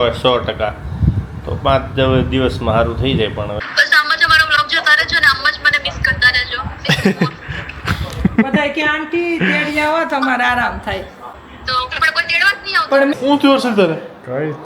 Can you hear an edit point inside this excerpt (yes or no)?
yes